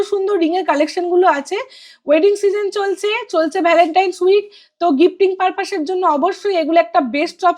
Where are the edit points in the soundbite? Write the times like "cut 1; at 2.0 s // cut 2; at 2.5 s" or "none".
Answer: none